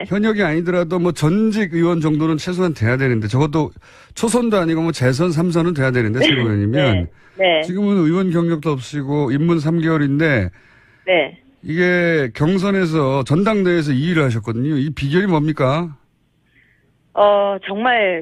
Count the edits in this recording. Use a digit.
0